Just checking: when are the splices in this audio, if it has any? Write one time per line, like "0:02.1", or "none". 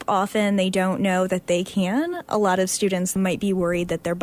0:03.1